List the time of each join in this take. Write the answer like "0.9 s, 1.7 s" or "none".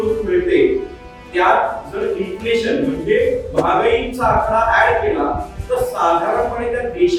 none